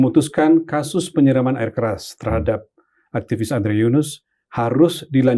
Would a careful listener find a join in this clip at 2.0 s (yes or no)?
no